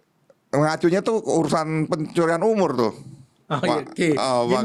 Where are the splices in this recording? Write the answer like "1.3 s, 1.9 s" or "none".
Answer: none